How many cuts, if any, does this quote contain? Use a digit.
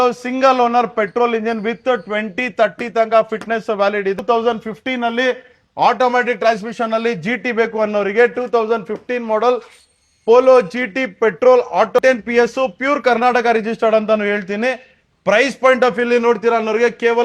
2